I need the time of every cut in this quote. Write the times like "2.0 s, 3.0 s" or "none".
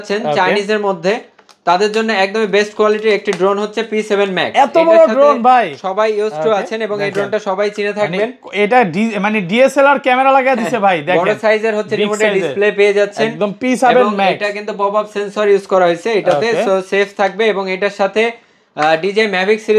none